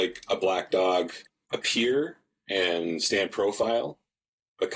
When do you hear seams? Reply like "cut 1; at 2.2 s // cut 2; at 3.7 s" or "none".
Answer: cut 1; at 1.2 s